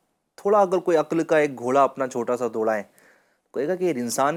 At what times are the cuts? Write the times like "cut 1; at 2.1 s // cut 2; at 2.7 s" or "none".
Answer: none

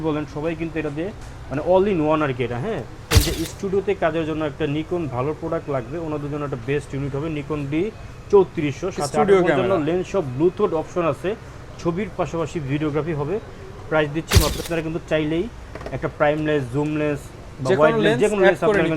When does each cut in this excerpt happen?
cut 1; at 3.0 s // cut 2; at 14.6 s

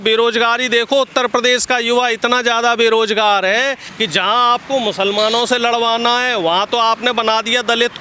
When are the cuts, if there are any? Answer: cut 1; at 3.9 s

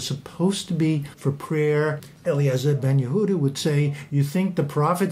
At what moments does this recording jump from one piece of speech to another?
cut 1; at 1.1 s // cut 2; at 2.0 s

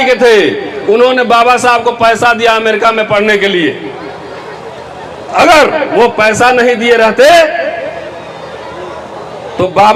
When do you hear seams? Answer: none

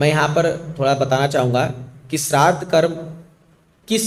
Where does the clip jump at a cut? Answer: none

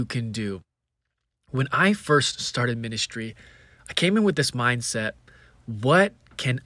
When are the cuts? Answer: none

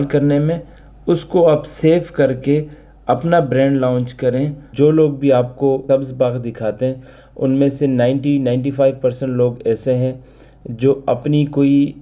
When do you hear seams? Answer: cut 1; at 4.6 s // cut 2; at 5.8 s

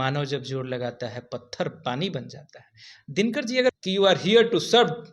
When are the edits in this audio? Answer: cut 1; at 3.8 s

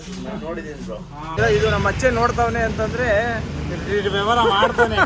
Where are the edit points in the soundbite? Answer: cut 1; at 1.4 s

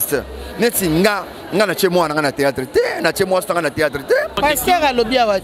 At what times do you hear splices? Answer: cut 1; at 4.4 s

